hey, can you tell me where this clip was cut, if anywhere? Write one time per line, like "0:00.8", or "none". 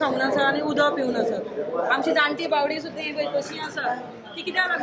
none